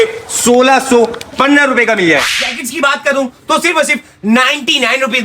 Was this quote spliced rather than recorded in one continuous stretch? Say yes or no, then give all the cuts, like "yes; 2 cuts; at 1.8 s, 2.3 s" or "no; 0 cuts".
yes; 1 cut; at 2.3 s